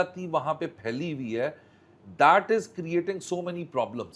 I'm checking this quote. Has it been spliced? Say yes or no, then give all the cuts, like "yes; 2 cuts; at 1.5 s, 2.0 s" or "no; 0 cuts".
no; 0 cuts